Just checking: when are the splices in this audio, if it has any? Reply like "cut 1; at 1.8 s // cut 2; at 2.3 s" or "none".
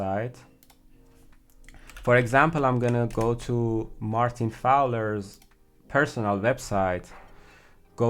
none